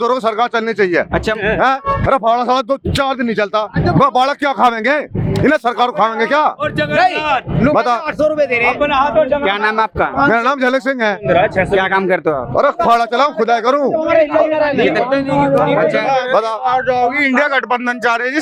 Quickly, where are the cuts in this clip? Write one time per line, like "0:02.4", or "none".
none